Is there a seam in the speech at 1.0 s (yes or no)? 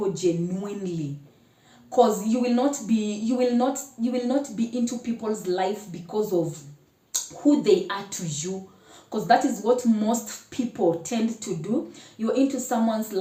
no